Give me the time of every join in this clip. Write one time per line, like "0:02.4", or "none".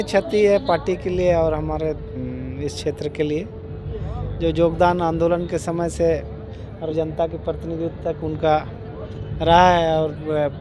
none